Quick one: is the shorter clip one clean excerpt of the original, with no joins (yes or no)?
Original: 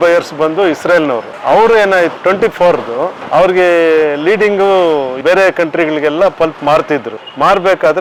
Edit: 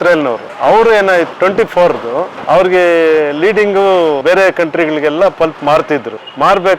no